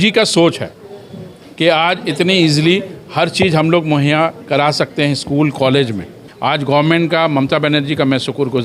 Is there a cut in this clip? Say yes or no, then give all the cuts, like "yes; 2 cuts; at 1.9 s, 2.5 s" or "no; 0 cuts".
yes; 1 cut; at 6.2 s